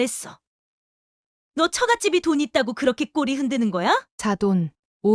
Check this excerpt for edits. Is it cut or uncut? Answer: cut